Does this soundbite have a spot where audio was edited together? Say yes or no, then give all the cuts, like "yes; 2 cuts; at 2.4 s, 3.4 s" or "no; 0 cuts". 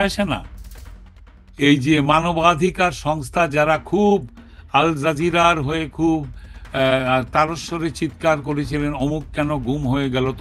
no; 0 cuts